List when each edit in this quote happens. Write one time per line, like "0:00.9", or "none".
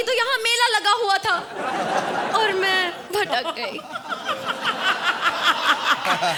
none